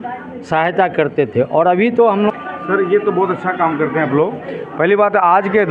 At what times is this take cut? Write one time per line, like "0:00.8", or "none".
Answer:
0:02.3

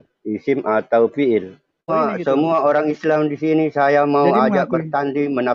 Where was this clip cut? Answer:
0:01.9

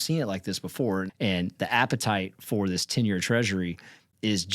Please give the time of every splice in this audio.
0:01.1

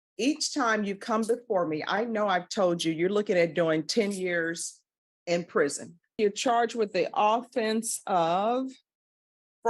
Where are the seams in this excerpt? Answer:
0:06.2

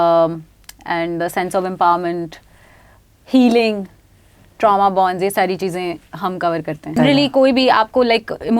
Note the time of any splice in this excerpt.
0:07.0

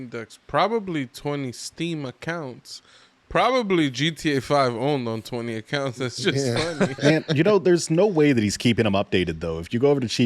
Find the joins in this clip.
0:06.9

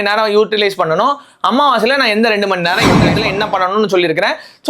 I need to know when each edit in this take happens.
0:03.1

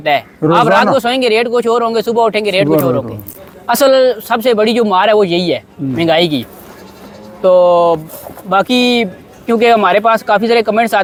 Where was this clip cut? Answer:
none

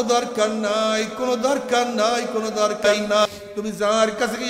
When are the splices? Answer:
0:03.3

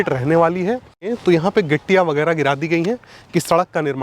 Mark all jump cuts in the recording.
0:01.1

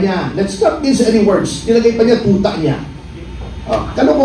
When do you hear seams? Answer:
none

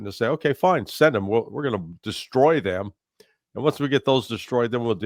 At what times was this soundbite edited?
none

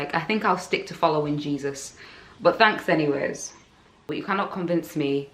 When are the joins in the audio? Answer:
0:04.1

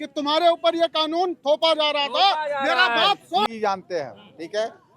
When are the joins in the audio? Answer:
0:03.5

